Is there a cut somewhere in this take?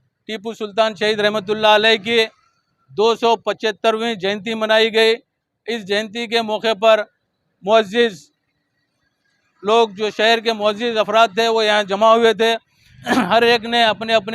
no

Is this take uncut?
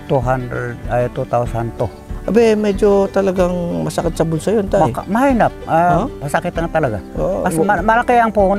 yes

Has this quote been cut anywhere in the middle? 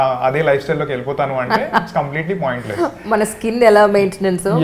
no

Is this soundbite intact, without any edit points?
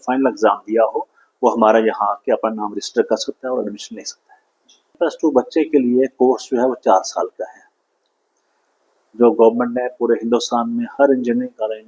no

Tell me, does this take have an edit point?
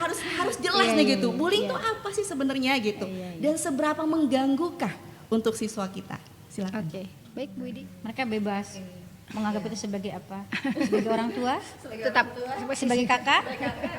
yes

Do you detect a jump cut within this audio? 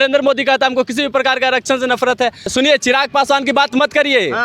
yes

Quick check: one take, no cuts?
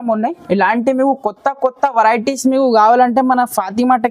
yes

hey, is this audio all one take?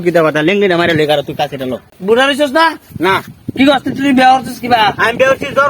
no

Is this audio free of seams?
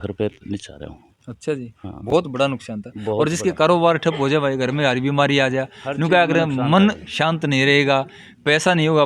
yes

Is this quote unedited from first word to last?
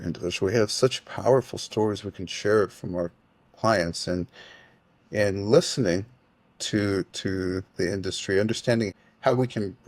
no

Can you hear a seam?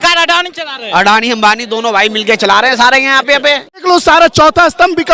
yes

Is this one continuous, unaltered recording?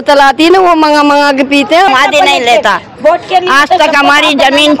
no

